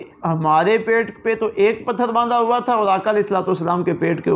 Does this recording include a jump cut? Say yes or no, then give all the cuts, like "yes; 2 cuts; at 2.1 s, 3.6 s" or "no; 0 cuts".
no; 0 cuts